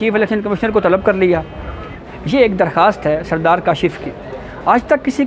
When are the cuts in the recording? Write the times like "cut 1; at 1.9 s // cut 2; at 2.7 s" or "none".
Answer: cut 1; at 2.0 s